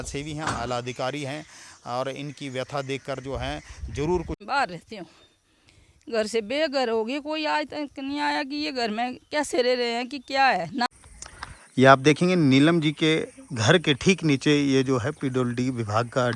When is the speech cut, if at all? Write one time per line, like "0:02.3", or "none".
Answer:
0:04.4
0:11.0